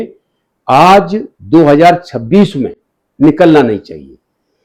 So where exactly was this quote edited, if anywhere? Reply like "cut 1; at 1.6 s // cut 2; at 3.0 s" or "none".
none